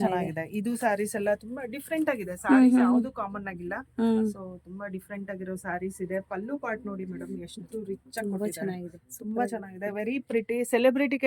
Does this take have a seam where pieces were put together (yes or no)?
no